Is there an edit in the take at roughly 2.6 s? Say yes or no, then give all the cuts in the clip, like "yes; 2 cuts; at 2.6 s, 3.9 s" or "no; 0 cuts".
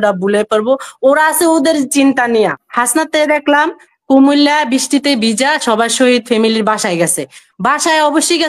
yes; 1 cut; at 2.6 s